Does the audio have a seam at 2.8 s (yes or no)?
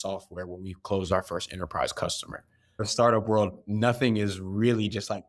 yes